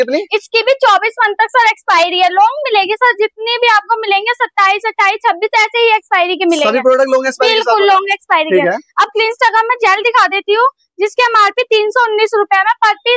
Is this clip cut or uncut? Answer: uncut